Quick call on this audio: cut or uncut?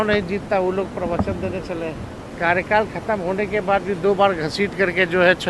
cut